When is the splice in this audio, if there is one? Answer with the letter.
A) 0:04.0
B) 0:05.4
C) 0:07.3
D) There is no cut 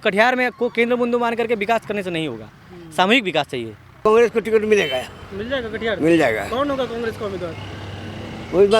A